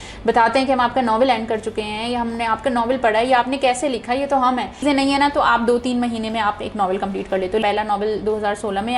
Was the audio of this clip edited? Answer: yes; 2 cuts; at 4.8 s, 7.6 s

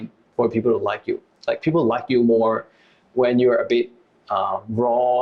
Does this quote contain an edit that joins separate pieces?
yes; 1 cut; at 1.3 s

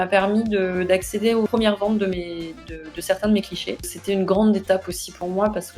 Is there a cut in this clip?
yes; 2 cuts; at 1.5 s, 3.9 s

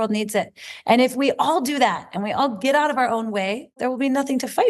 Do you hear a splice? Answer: yes; 1 cut; at 3.7 s

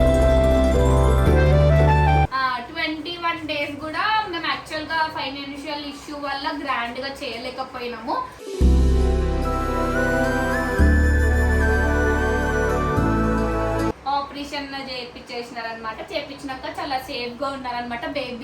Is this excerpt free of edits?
no; 2 cuts; at 2.3 s, 14.0 s

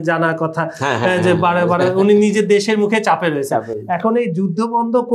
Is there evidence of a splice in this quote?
no; 0 cuts

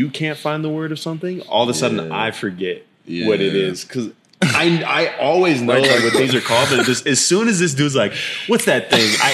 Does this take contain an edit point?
no; 0 cuts

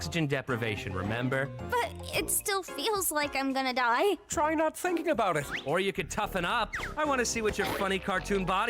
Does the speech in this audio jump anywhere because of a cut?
yes; 1 cut; at 6.4 s

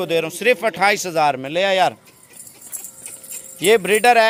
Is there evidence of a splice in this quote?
no; 0 cuts

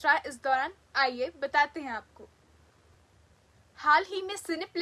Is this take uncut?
no; 1 cut; at 2.9 s

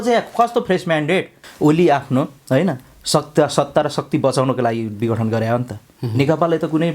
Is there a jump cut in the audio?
yes; 1 cut; at 1.4 s

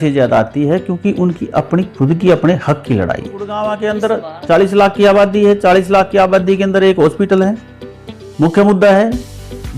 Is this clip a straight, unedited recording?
no; 1 cut; at 3.6 s

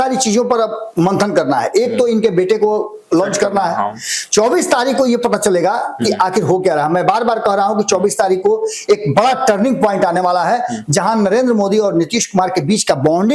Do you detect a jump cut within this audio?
no; 0 cuts

